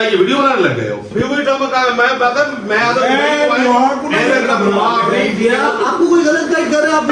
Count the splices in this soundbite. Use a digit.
1